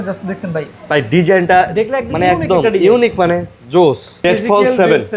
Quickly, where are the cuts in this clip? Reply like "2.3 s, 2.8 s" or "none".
4.2 s